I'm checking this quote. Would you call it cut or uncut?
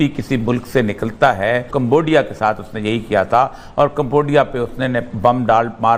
cut